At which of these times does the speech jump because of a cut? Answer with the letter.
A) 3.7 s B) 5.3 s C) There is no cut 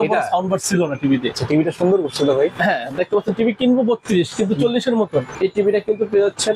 B